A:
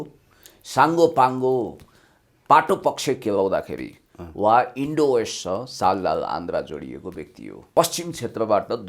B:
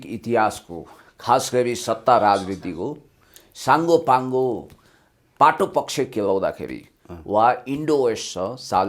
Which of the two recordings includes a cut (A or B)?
A